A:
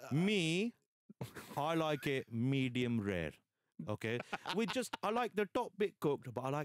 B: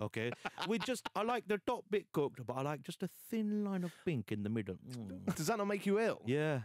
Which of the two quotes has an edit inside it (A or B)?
B